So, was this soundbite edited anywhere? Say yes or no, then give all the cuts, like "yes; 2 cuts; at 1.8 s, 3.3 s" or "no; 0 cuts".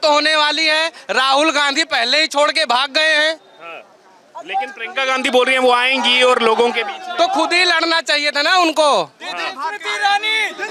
no; 0 cuts